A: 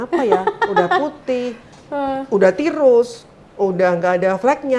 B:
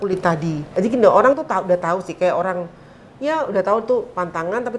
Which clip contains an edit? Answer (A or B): B